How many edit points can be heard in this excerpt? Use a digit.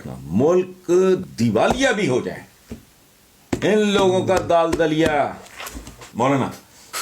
2